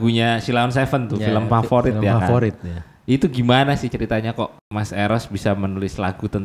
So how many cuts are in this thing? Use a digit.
1